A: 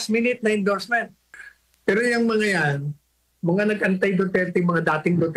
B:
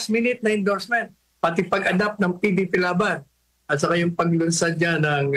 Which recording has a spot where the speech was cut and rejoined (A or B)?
A